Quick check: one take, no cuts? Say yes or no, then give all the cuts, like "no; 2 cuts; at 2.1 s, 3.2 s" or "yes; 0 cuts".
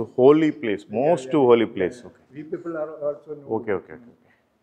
yes; 0 cuts